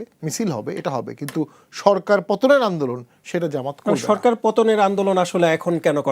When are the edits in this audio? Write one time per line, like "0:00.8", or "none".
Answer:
none